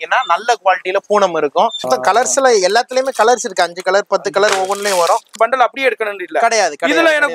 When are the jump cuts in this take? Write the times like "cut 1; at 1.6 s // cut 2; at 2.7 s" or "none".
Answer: cut 1; at 1.9 s // cut 2; at 5.3 s